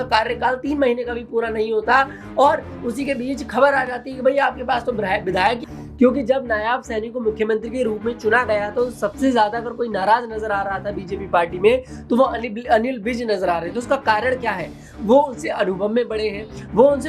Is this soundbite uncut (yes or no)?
no